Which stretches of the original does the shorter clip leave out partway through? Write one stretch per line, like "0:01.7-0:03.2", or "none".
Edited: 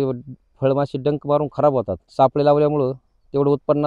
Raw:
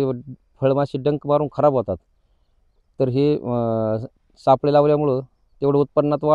0:02.0-0:04.3